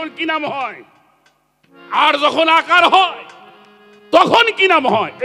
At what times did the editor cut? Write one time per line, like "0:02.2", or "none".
none